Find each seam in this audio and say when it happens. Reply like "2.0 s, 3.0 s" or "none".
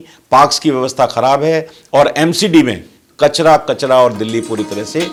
none